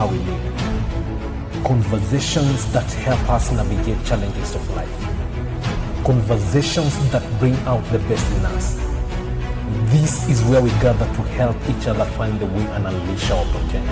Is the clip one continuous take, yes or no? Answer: yes